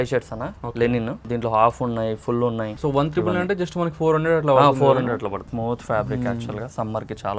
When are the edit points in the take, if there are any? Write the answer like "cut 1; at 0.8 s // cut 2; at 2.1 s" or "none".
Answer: cut 1; at 1.2 s // cut 2; at 2.7 s // cut 3; at 5.4 s